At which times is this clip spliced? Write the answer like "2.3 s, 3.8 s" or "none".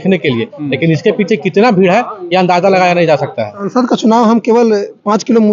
3.7 s